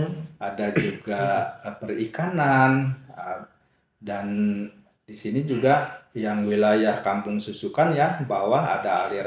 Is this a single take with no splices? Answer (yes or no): yes